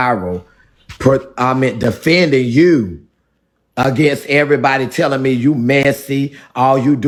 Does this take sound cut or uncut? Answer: uncut